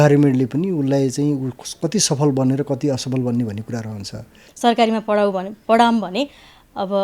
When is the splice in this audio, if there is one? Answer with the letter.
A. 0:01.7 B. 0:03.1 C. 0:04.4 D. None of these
C